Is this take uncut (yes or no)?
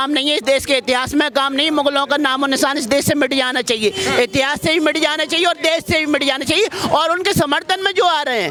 yes